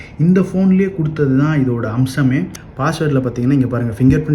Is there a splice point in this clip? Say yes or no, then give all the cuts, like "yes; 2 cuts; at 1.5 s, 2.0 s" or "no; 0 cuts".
yes; 1 cut; at 2.6 s